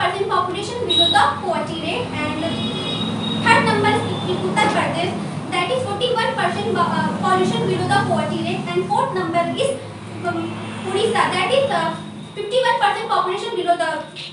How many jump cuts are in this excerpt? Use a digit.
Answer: 0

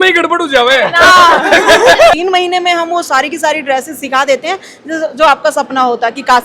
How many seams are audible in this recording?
1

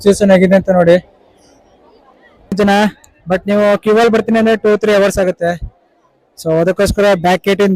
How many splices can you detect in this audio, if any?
1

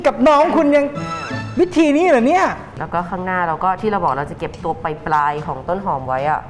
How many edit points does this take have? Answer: 1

